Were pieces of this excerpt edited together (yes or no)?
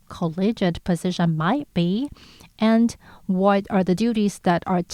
no